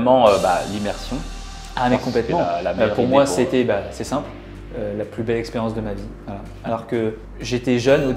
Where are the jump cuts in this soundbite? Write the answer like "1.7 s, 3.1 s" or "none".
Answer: none

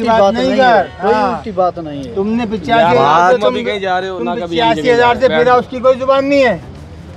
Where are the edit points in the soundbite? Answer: none

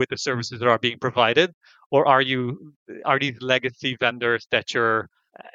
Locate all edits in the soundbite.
none

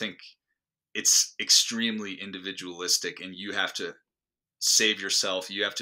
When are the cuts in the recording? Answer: none

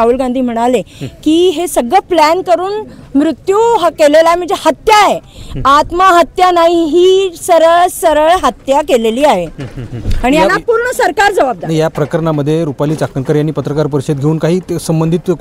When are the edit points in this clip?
none

